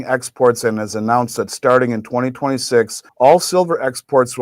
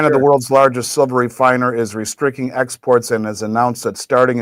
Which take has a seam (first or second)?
first